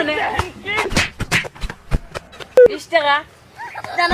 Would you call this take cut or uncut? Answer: cut